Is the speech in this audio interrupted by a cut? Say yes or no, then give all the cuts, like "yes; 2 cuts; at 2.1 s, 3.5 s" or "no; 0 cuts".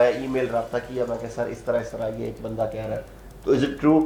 no; 0 cuts